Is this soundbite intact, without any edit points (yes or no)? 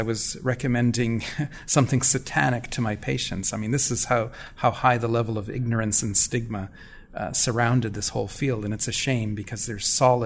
yes